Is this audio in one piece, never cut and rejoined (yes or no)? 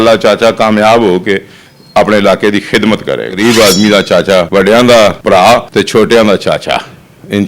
no